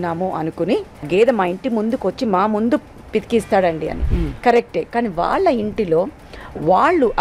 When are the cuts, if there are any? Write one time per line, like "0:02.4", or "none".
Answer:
0:01.1